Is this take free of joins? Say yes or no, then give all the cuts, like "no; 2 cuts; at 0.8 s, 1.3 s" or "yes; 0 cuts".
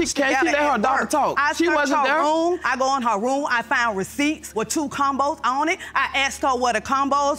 yes; 0 cuts